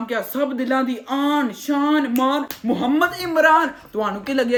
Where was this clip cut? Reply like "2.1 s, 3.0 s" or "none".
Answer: none